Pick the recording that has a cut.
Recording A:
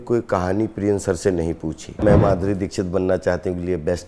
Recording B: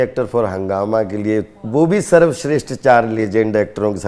A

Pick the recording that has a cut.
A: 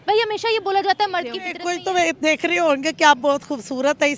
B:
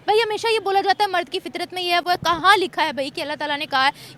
A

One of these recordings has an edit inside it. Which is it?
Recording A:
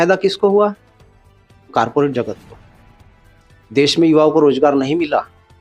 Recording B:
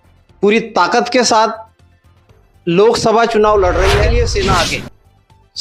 B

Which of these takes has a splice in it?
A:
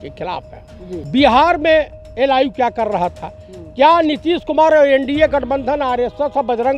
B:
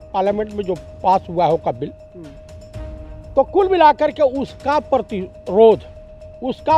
A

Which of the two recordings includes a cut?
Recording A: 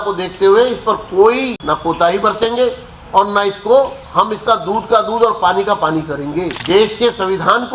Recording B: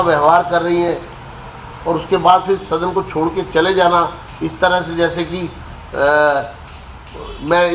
A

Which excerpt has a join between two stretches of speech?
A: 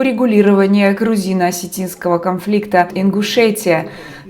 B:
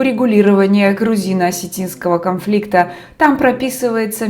A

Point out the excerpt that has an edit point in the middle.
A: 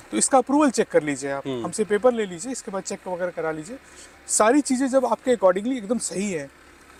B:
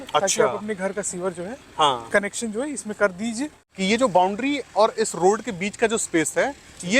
B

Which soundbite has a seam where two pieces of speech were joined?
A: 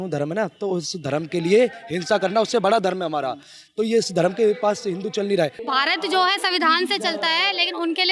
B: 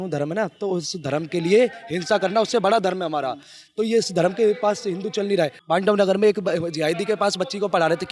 A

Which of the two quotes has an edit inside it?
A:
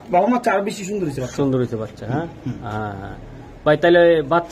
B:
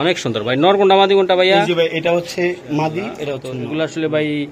B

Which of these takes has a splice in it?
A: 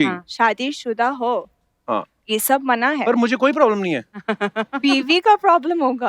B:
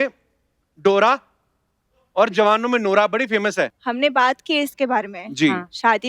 B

